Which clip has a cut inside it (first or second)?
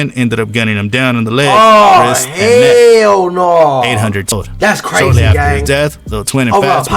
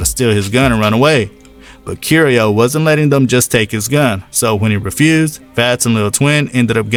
first